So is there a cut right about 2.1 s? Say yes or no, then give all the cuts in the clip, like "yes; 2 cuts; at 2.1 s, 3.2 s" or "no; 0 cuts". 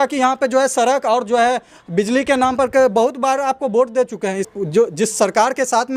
no; 1 cut; at 4.5 s